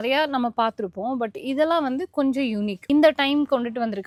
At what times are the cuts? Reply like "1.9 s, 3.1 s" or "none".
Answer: none